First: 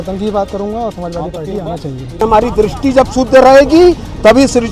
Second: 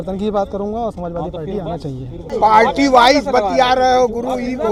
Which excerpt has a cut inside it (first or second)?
first